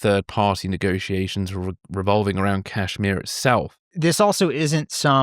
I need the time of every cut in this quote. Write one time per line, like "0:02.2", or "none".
0:03.7